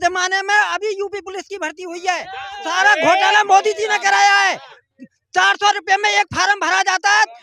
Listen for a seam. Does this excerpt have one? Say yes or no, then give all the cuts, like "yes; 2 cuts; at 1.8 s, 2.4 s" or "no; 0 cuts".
no; 0 cuts